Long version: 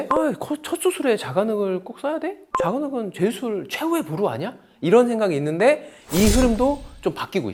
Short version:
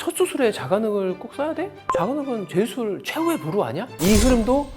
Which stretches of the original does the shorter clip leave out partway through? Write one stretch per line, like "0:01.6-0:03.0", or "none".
0:04.5-0:06.0